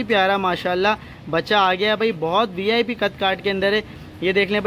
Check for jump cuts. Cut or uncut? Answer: uncut